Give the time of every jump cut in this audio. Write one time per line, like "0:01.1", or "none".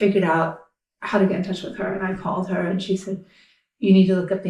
none